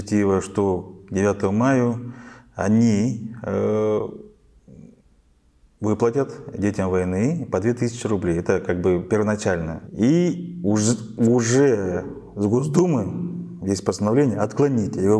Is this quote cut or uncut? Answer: cut